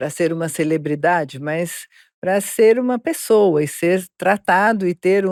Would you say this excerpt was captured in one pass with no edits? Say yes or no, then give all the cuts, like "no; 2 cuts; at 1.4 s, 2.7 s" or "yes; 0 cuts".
yes; 0 cuts